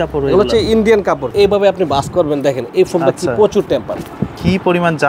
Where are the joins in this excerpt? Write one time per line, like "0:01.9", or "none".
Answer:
0:01.3
0:04.0